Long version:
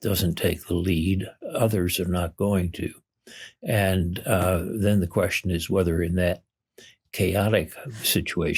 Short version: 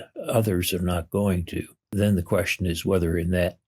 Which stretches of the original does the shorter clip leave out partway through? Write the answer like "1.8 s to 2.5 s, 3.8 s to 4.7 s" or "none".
3.1 s to 4.7 s